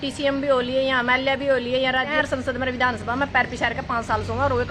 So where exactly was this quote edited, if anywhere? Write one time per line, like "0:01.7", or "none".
0:02.2

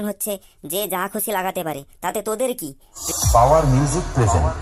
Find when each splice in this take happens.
0:02.9

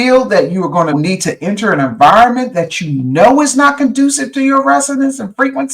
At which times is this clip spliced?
0:00.9

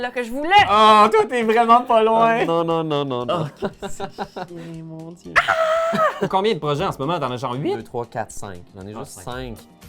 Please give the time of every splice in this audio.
0:06.3

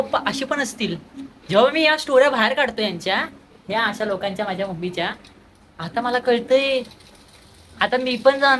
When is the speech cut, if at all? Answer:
none

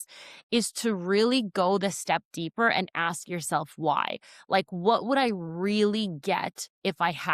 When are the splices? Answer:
none

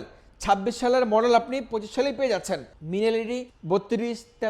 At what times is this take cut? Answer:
0:02.7
0:03.5

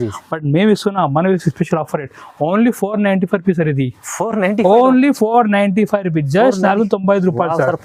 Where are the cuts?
none

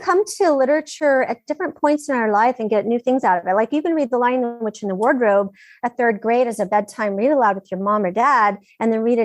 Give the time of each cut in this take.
0:00.9

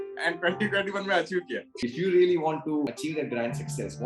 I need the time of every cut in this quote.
0:01.6
0:02.9

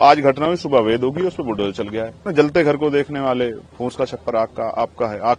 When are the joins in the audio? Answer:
0:02.3

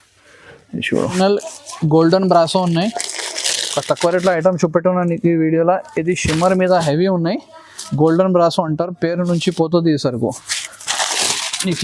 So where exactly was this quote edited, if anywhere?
0:01.1

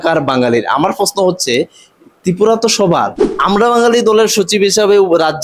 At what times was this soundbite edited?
0:03.3

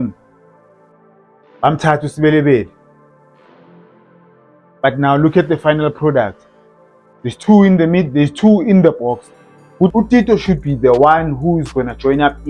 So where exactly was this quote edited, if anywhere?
0:09.9

